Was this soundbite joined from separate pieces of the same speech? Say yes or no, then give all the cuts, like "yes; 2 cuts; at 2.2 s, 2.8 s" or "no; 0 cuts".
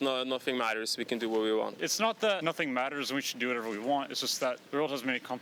yes; 2 cuts; at 2.1 s, 4.6 s